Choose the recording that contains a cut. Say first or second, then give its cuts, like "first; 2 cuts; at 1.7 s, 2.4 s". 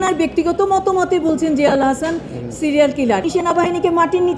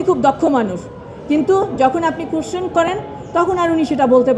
first; 1 cut; at 3.3 s